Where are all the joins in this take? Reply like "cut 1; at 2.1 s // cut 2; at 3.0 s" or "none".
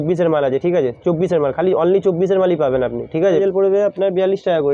cut 1; at 3.4 s